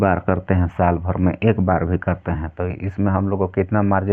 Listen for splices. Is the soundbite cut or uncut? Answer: uncut